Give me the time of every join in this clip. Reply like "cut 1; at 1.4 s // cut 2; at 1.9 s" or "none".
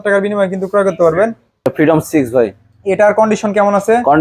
cut 1; at 1.7 s